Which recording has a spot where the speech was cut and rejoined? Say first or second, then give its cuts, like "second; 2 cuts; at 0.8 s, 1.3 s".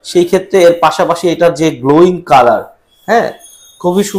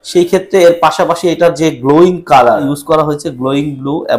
second; 1 cut; at 2.6 s